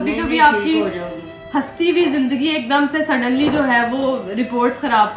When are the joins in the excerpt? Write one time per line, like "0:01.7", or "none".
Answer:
none